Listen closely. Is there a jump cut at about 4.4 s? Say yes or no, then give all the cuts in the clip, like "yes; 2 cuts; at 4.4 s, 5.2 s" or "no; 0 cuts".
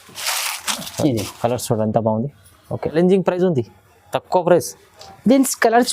no; 1 cut; at 2.9 s